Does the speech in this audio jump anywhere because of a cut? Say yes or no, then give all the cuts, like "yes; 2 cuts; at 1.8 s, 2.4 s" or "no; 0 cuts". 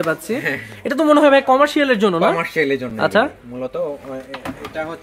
no; 0 cuts